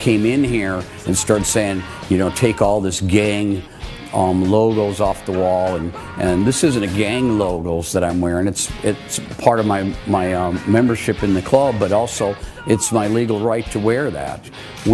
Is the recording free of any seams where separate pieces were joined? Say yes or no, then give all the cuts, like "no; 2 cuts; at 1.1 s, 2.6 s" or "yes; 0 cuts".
yes; 0 cuts